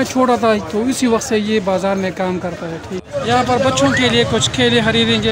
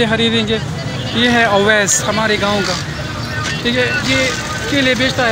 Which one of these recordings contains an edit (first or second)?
first